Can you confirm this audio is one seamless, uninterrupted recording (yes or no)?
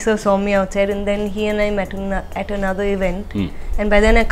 yes